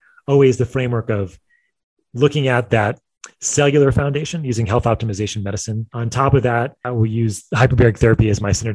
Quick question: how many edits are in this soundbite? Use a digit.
2